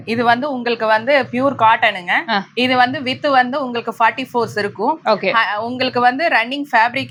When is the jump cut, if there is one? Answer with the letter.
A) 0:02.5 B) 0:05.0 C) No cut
C